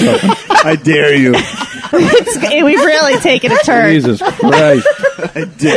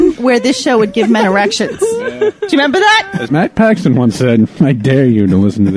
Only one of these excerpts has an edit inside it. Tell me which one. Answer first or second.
first